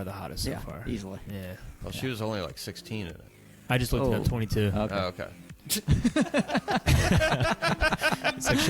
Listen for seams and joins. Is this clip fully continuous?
no; 1 cut; at 1.7 s

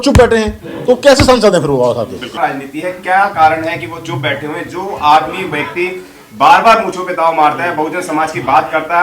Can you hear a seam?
yes; 1 cut; at 2.3 s

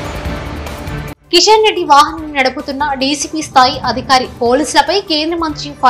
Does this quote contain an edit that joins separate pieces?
no; 0 cuts

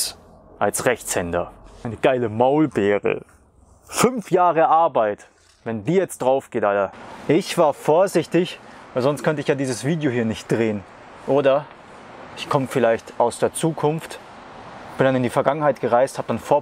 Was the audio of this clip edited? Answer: yes; 2 cuts; at 1.8 s, 6.9 s

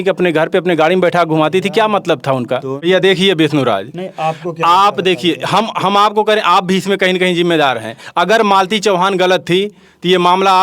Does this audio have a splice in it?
yes; 1 cut; at 2.8 s

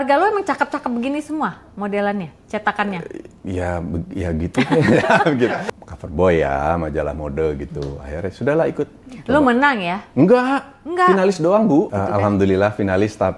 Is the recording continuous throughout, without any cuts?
no; 2 cuts; at 5.6 s, 11.9 s

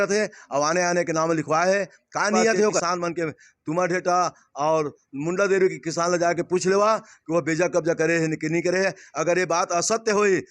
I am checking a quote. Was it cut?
yes; 1 cut; at 2.8 s

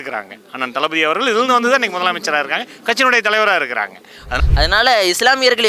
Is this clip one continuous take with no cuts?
no; 1 cut; at 4.4 s

